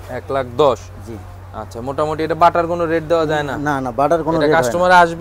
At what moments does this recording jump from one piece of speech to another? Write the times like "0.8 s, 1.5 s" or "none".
none